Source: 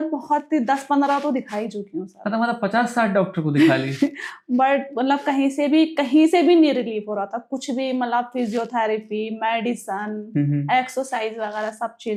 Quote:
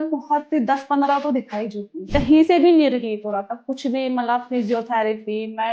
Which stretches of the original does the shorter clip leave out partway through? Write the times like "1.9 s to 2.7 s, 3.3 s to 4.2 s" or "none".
2.1 s to 6.0 s

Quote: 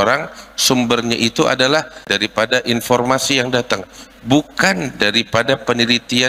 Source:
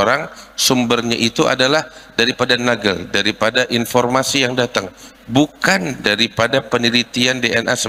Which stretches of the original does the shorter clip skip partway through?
2.0 s to 3.1 s

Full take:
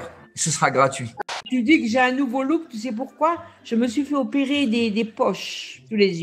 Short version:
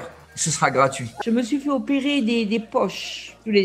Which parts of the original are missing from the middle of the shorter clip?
1.1 s to 3.5 s

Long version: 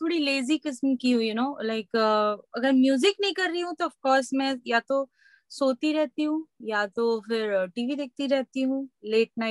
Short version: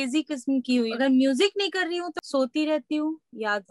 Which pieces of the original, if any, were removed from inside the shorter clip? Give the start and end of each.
1.3 s to 2.5 s, 3.8 s to 5.4 s

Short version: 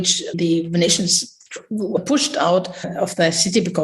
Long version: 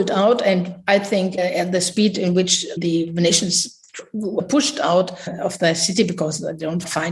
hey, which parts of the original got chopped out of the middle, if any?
none

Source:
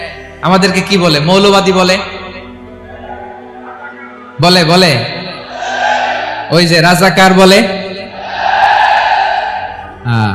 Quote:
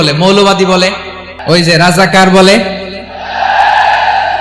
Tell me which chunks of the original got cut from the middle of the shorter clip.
2.4 s to 6.3 s

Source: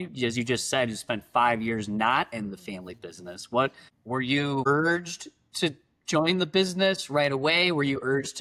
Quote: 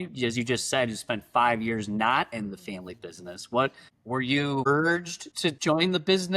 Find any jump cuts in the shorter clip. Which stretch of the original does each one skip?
5.4 s to 5.9 s

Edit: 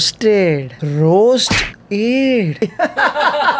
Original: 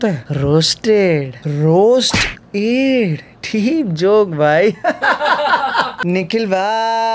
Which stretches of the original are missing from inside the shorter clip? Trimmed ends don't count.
3.2 s to 4.7 s

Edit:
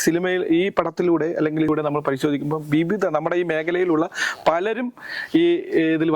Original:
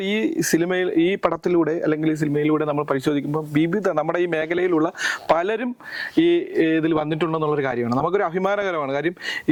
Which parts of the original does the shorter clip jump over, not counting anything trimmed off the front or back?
2.2 s to 2.5 s

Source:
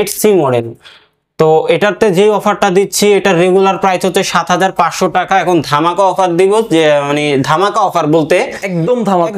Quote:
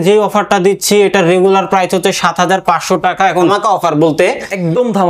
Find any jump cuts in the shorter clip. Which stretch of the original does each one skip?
5.6 s to 7.6 s

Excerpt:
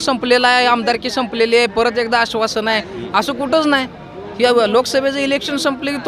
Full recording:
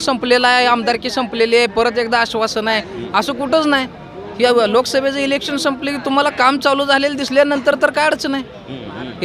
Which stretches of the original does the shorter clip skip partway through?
none

